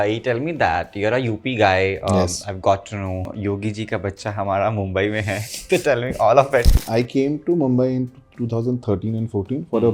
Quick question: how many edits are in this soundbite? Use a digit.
2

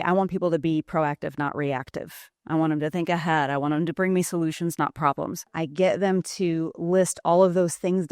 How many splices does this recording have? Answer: 1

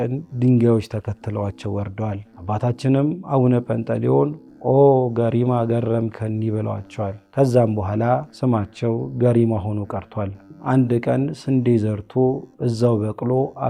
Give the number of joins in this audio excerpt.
4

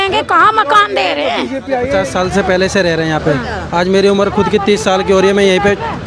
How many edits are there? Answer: 1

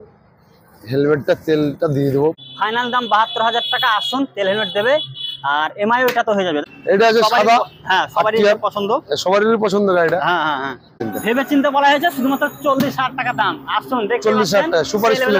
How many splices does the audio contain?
3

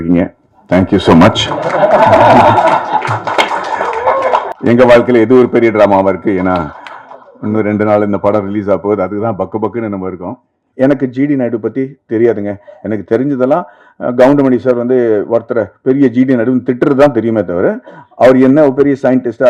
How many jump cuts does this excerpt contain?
1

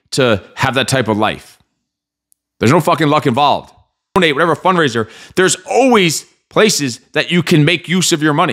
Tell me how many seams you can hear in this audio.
1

